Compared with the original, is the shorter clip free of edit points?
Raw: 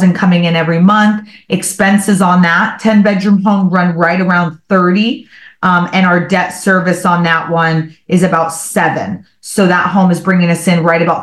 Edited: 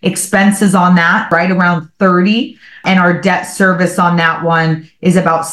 no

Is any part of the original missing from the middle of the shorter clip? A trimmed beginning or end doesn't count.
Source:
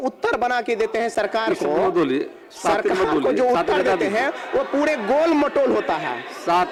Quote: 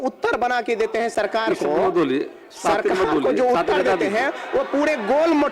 no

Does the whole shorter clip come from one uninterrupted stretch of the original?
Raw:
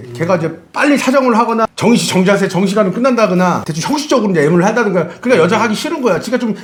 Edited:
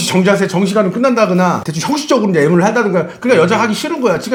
yes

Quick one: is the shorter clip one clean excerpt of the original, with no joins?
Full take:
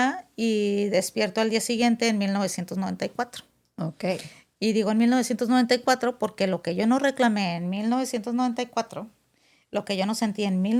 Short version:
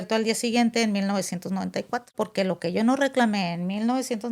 no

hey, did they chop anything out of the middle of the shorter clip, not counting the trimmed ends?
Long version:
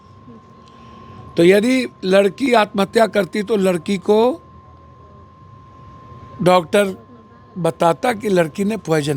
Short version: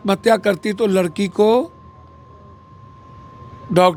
no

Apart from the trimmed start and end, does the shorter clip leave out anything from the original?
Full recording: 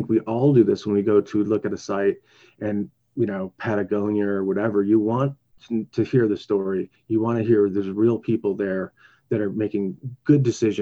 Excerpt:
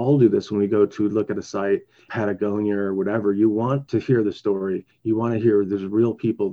yes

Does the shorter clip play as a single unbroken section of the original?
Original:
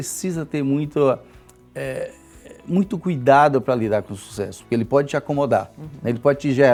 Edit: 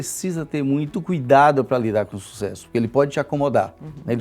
no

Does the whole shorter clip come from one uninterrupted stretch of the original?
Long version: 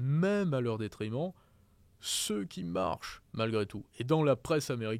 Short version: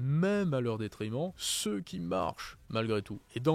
no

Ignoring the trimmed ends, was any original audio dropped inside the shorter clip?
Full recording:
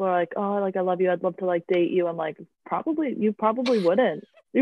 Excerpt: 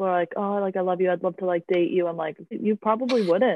yes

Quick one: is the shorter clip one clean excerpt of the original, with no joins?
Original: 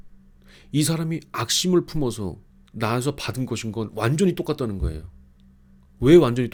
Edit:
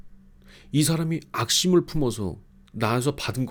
yes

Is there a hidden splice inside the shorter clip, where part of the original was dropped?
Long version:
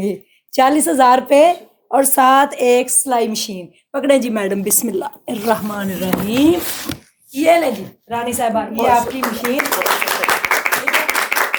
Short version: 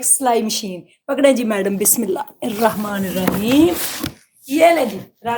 no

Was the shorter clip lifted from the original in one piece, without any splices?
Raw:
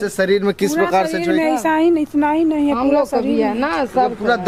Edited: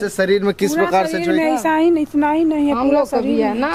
yes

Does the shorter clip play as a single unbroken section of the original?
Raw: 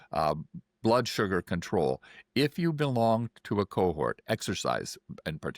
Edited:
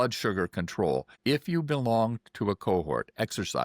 no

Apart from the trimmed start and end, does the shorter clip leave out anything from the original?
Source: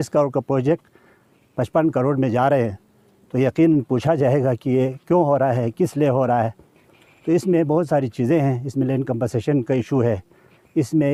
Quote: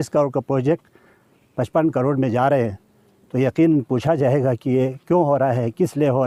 no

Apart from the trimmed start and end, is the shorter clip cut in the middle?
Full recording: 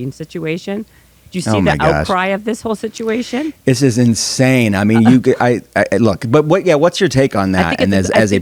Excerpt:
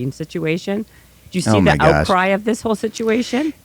no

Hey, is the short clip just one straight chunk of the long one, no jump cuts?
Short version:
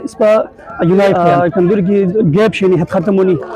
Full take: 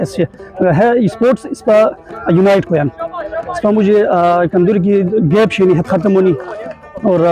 no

